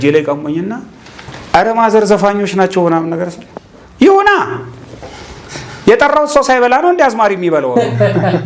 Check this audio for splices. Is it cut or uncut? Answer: uncut